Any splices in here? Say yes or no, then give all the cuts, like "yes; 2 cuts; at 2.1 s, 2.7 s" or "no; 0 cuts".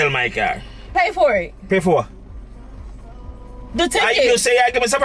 yes; 2 cuts; at 0.9 s, 3.3 s